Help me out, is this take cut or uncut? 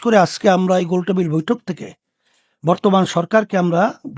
uncut